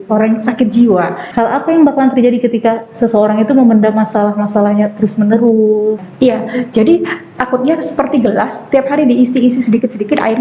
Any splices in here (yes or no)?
yes